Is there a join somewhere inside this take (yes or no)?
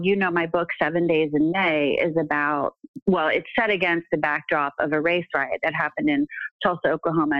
yes